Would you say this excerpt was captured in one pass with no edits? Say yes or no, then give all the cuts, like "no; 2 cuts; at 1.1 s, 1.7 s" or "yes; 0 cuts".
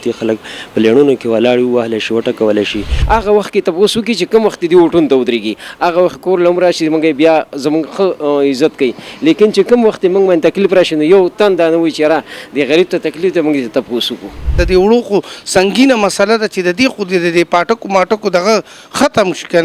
no; 2 cuts; at 2.9 s, 14.6 s